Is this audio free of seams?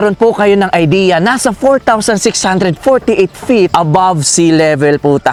yes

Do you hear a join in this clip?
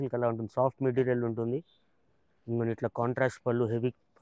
no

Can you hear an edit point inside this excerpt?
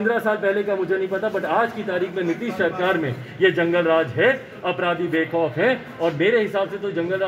no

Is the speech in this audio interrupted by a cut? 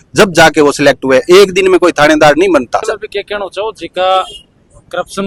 no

